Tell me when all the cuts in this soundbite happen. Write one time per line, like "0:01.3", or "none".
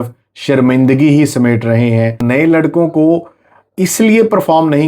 0:02.2